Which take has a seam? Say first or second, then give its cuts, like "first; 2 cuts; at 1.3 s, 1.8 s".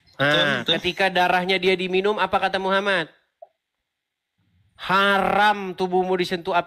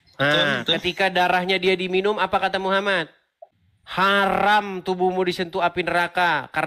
second; 1 cut; at 4.0 s